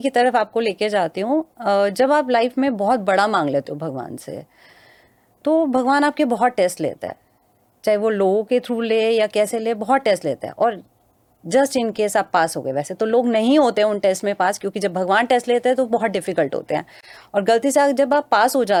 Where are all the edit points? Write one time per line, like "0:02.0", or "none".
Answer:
none